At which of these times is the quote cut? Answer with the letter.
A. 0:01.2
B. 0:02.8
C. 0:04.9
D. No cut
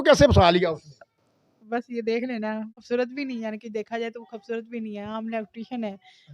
B